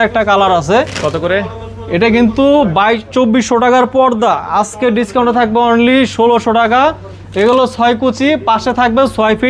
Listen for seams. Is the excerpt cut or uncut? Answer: uncut